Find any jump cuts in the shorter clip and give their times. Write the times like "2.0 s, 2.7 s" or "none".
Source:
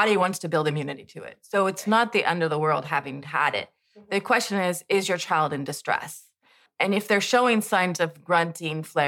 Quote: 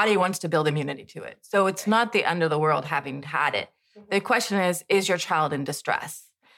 none